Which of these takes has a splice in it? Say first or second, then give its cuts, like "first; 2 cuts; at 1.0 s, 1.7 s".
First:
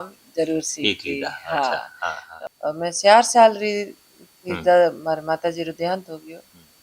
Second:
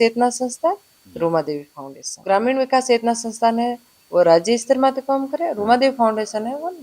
first; 1 cut; at 2.3 s